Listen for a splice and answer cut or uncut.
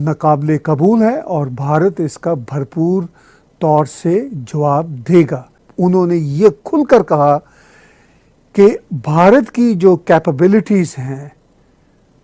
cut